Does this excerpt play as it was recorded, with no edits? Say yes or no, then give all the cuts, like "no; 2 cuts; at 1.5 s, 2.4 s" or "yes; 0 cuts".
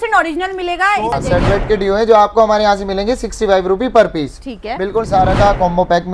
no; 2 cuts; at 1.2 s, 5.1 s